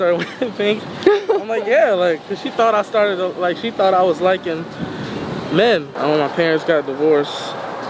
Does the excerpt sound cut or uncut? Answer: cut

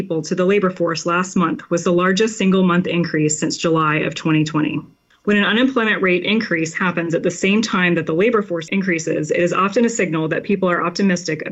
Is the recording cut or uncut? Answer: cut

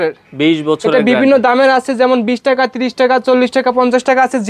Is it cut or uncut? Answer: uncut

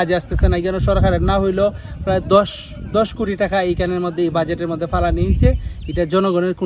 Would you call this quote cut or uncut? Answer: uncut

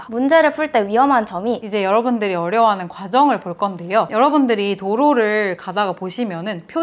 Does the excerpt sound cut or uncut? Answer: cut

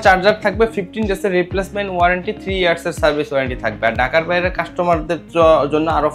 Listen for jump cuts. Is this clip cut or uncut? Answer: uncut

